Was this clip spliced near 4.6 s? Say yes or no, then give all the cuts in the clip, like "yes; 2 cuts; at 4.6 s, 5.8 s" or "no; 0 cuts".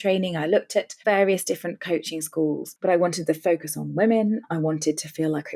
no; 1 cut; at 2.7 s